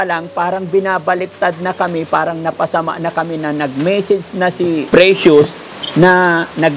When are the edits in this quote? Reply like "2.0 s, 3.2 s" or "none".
4.8 s